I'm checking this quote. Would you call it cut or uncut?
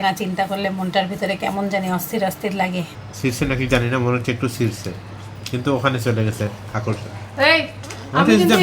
cut